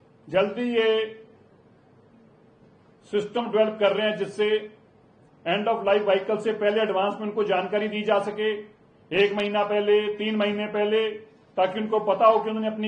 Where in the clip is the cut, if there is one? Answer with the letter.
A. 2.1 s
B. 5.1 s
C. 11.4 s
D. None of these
D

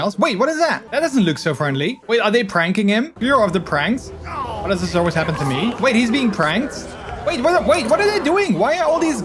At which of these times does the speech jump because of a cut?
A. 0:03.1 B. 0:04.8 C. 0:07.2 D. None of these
A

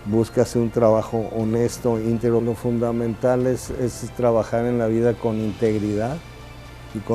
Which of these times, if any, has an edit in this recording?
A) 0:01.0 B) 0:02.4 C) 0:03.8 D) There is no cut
B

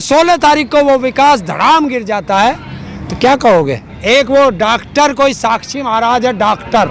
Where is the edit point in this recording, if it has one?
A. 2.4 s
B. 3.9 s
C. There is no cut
B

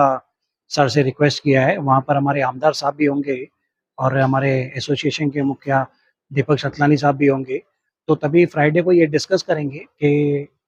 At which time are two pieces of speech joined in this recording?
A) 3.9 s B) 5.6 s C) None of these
C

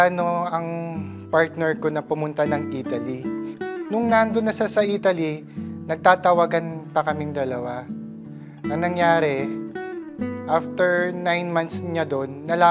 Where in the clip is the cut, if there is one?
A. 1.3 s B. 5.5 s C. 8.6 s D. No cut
C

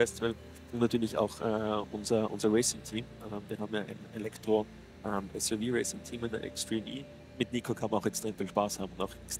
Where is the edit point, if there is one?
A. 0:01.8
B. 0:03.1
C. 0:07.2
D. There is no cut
C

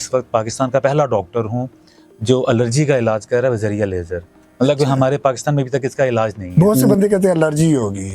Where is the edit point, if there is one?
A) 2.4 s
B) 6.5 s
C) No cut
B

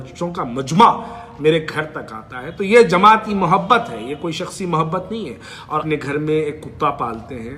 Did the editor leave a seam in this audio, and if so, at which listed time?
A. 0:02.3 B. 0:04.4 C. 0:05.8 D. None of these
C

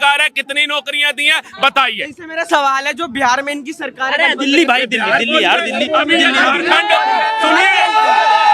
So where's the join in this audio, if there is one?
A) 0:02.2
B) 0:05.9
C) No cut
C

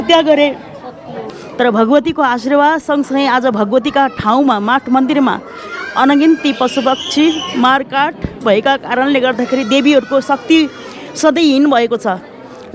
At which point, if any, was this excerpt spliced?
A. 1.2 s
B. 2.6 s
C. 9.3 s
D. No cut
A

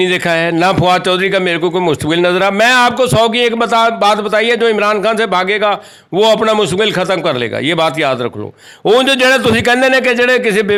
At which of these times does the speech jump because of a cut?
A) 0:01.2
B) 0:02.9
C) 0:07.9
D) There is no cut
D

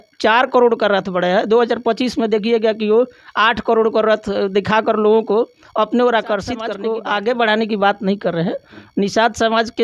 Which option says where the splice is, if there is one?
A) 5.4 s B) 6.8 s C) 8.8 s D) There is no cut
B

